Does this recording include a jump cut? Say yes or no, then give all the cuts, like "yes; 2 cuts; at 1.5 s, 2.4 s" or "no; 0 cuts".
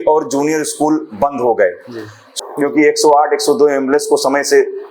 yes; 1 cut; at 2.3 s